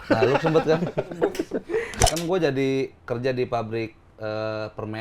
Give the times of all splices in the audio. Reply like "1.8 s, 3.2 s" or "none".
2.0 s